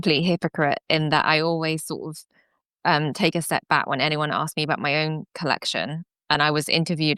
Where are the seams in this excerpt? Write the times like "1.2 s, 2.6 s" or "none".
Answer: none